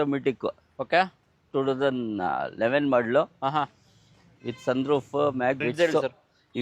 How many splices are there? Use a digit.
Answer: 1